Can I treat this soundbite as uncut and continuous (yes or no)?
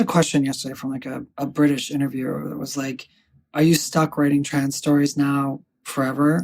no